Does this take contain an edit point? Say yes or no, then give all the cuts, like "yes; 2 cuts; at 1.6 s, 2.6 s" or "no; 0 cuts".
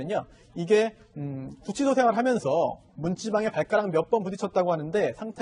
yes; 1 cut; at 2.1 s